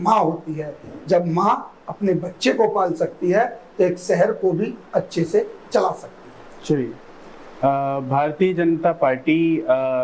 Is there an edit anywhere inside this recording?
no; 0 cuts

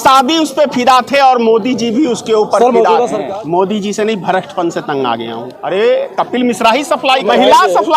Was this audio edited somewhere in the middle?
yes; 3 cuts; at 3.2 s, 5.5 s, 7.2 s

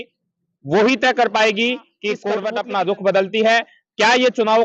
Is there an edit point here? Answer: yes; 1 cut; at 2.3 s

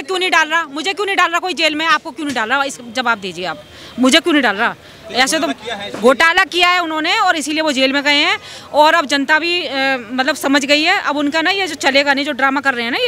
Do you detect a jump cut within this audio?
no; 0 cuts

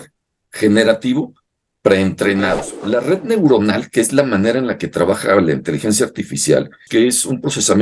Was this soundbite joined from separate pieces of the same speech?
yes; 2 cuts; at 2.7 s, 6.8 s

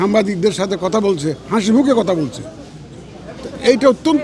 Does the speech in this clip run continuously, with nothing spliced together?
yes; 0 cuts

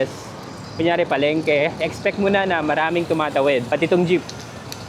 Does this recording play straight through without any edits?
yes; 0 cuts

